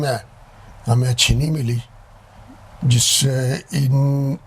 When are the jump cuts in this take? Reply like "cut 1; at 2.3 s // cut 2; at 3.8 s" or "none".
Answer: none